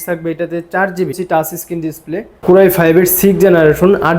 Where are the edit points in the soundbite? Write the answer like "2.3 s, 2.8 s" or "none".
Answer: 1.2 s, 2.4 s